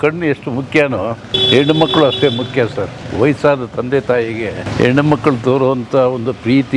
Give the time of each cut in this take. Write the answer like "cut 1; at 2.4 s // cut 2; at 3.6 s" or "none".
cut 1; at 1.3 s // cut 2; at 4.6 s